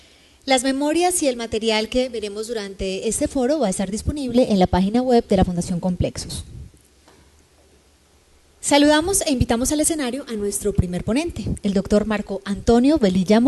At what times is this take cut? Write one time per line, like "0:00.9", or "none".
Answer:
none